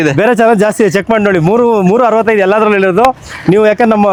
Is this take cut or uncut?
uncut